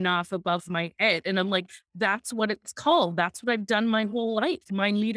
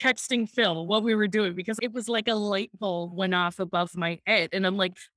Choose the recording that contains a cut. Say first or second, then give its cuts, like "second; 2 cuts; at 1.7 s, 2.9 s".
second; 1 cut; at 1.8 s